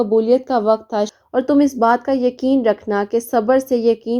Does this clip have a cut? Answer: yes; 1 cut; at 1.0 s

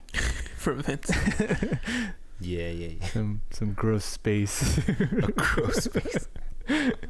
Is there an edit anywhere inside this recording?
no; 0 cuts

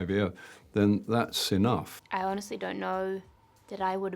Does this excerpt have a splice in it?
yes; 1 cut; at 1.9 s

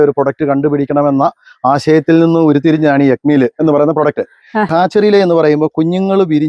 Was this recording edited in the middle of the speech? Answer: yes; 1 cut; at 4.7 s

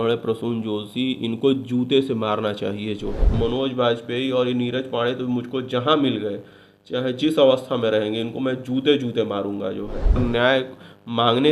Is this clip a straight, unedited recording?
no; 2 cuts; at 3.3 s, 10.2 s

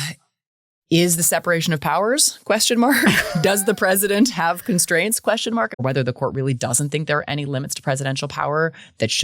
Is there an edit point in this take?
yes; 1 cut; at 5.7 s

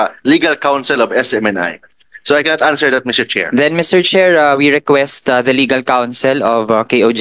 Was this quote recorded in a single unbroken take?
yes; 0 cuts

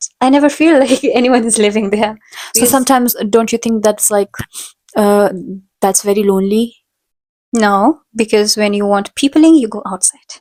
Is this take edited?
no; 0 cuts

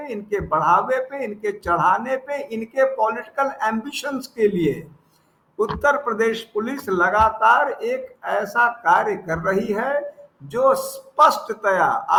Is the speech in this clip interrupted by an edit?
no; 0 cuts

